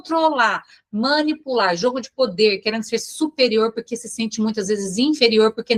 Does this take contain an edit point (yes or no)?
no